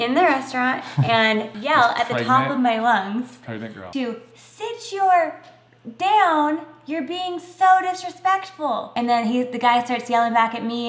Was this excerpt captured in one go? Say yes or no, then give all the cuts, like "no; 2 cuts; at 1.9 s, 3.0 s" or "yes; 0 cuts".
yes; 0 cuts